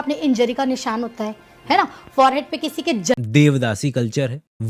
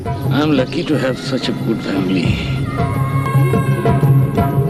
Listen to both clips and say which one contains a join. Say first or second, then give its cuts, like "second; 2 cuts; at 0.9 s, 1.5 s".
first; 2 cuts; at 1.8 s, 3.1 s